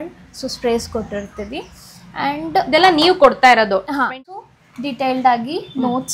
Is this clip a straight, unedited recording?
no; 1 cut; at 4.0 s

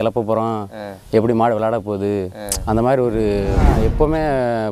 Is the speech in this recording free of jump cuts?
no; 1 cut; at 3.7 s

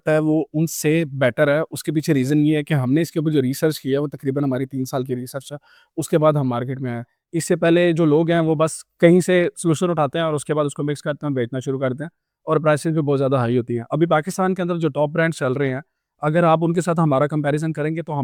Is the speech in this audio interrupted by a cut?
no; 0 cuts

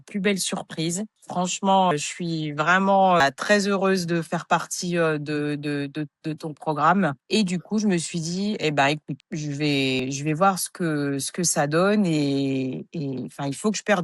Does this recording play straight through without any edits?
yes; 0 cuts

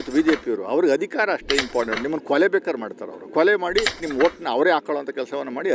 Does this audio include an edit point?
yes; 1 cut; at 4.1 s

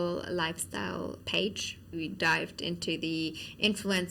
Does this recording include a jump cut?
yes; 2 cuts; at 1.2 s, 1.9 s

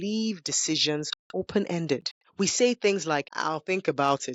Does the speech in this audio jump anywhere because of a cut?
yes; 3 cuts; at 1.2 s, 2.2 s, 3.3 s

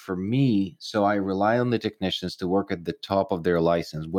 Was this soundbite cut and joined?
no; 0 cuts

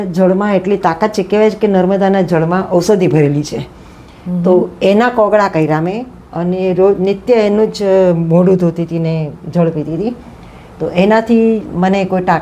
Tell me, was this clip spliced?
no; 0 cuts

